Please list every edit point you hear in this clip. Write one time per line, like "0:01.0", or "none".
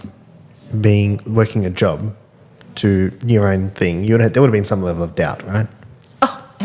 none